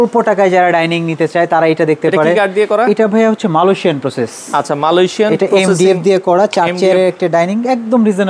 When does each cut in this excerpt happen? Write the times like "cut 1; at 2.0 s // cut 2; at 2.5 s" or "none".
none